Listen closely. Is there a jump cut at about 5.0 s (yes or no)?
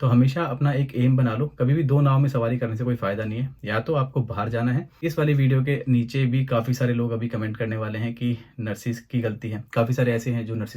yes